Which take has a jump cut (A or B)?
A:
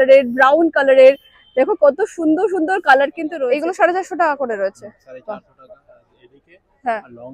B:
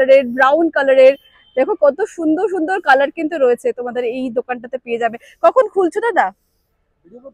A